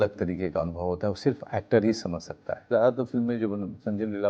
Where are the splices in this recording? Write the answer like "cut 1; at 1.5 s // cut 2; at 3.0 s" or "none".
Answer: cut 1; at 2.7 s